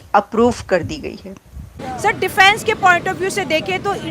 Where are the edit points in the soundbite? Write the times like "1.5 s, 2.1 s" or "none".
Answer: 1.9 s